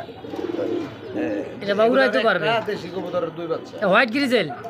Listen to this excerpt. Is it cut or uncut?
uncut